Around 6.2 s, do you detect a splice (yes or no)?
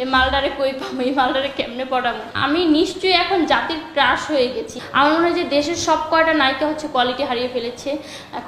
no